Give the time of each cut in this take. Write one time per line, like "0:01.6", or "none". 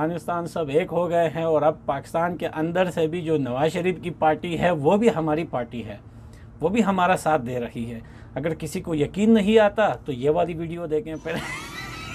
none